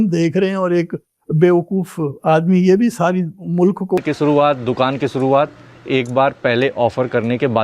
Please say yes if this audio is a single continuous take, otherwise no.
no